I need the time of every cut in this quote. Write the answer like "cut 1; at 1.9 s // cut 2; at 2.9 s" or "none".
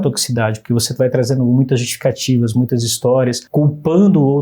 cut 1; at 3.4 s